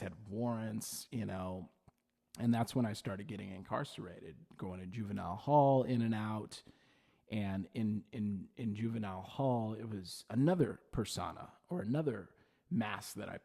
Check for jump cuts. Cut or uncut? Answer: uncut